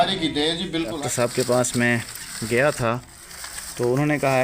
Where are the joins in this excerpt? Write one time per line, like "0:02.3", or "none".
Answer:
0:01.0